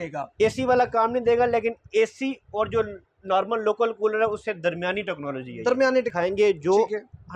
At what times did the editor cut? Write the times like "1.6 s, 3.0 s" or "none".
6.1 s